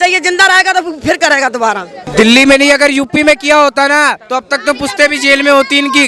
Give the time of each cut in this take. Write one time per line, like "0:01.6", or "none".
0:02.1